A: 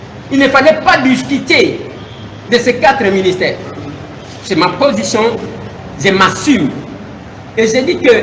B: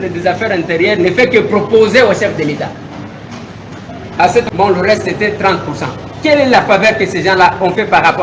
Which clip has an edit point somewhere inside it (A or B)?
B